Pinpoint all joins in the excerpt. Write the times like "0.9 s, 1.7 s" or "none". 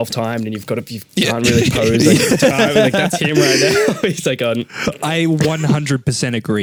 none